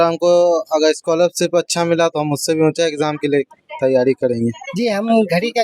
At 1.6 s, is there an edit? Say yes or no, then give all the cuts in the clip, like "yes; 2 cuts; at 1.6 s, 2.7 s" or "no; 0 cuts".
no; 1 cut; at 4.7 s